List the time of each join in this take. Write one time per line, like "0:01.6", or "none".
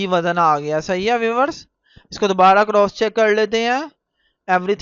none